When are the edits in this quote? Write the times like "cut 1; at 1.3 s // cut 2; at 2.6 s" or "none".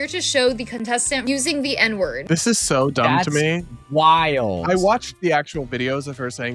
cut 1; at 1.2 s // cut 2; at 2.2 s